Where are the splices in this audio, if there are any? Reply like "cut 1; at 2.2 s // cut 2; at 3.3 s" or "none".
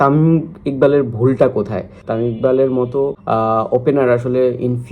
cut 1; at 2.0 s // cut 2; at 3.2 s